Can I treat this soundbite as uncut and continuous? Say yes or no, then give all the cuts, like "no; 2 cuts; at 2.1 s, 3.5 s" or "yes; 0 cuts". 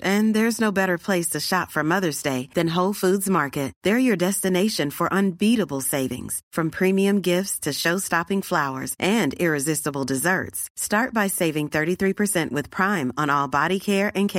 yes; 0 cuts